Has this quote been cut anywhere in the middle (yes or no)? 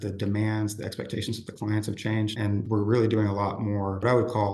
yes